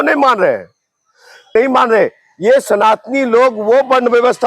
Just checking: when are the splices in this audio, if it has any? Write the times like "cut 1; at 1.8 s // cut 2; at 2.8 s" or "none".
cut 1; at 1.3 s

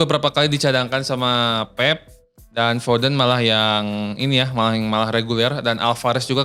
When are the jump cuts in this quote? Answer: none

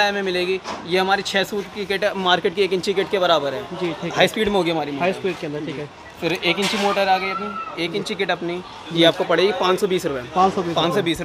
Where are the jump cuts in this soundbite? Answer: none

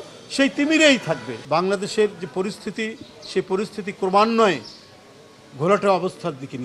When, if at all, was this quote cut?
cut 1; at 1.3 s

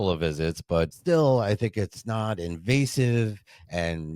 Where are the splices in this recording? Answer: cut 1; at 1.0 s

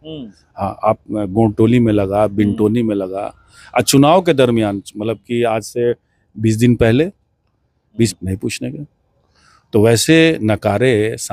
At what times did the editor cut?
cut 1; at 8.1 s

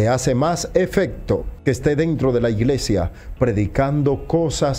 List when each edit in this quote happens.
cut 1; at 1.5 s

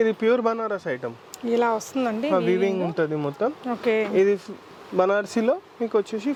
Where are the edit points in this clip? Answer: none

